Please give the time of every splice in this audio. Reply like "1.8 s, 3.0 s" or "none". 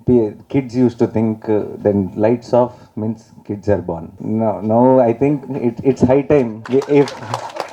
4.1 s, 6.6 s